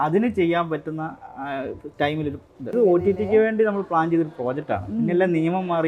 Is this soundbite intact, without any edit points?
no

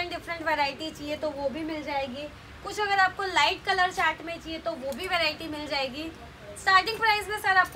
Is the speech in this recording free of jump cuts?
yes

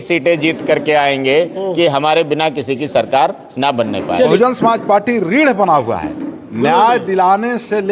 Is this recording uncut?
no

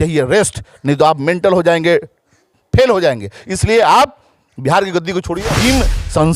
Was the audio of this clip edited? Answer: yes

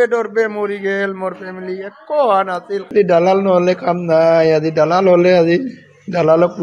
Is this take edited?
yes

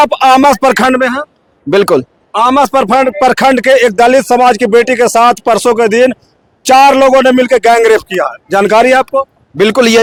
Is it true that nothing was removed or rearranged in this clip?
yes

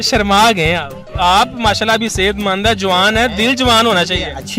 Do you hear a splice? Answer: yes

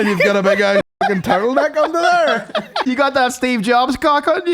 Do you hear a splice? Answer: yes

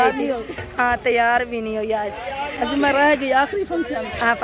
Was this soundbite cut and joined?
no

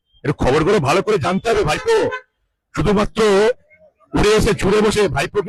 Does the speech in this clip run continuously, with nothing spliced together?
yes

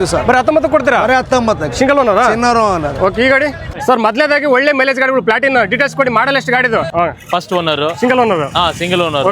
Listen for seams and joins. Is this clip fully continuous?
no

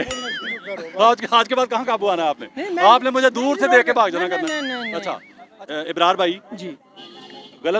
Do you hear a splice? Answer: no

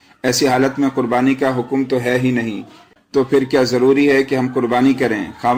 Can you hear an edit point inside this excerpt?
no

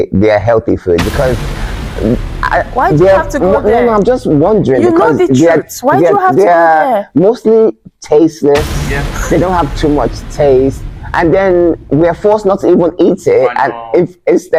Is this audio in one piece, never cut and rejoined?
yes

